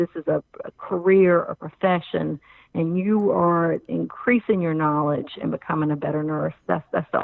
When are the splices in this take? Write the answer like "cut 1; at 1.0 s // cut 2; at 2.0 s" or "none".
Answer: none